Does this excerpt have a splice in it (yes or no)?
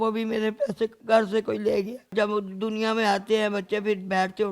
yes